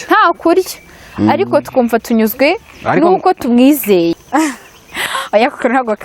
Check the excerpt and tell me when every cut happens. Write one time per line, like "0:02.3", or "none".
0:04.2